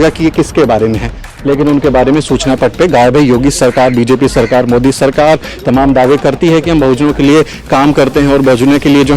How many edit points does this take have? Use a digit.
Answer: 1